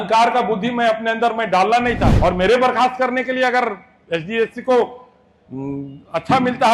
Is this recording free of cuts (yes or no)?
no